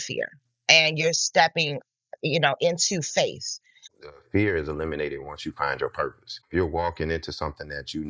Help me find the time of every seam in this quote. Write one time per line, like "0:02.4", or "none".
0:04.1
0:06.5